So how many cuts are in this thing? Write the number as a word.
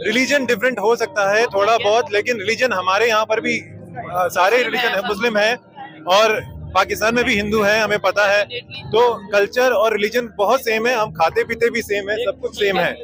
zero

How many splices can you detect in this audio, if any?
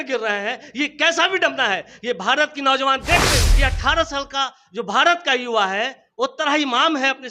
one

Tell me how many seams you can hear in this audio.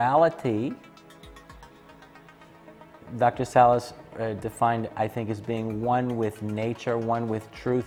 zero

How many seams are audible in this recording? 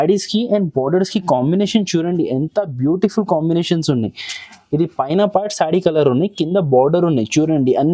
zero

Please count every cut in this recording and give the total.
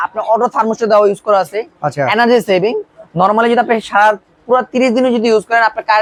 zero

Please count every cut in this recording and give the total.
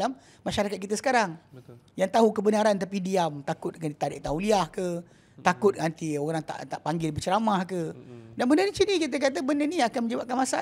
zero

